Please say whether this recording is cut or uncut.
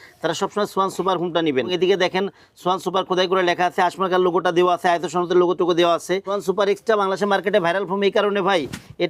cut